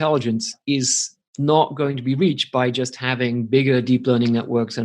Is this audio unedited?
yes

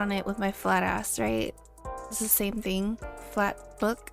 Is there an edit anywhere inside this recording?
yes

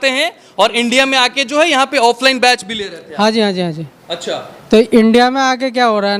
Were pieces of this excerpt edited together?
no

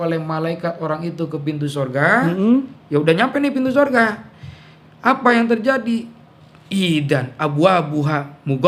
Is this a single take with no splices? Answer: yes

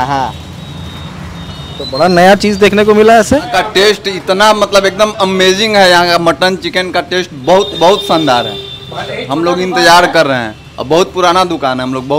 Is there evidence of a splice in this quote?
yes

